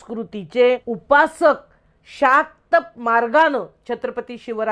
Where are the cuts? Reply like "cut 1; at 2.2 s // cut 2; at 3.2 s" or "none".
cut 1; at 0.9 s